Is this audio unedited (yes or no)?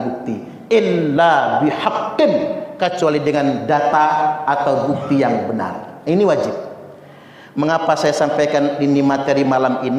yes